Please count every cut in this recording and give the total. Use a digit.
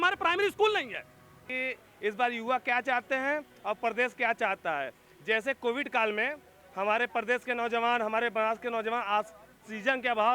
1